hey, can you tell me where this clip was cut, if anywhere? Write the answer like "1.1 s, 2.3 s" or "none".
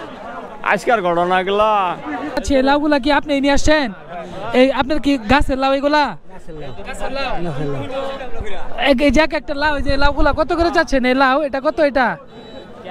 2.4 s